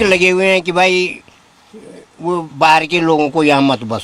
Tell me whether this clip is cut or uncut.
uncut